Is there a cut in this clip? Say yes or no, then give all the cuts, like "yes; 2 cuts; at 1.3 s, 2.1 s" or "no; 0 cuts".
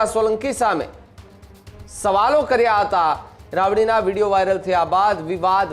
no; 0 cuts